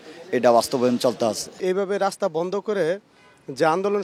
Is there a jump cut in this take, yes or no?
yes